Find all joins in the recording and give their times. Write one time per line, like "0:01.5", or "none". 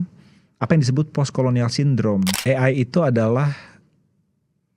0:02.4